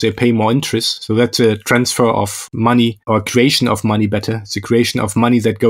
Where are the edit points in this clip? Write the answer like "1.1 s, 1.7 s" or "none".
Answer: 2.9 s